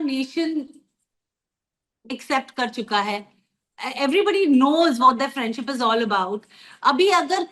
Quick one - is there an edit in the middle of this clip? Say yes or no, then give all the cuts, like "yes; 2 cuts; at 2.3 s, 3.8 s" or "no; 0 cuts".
no; 0 cuts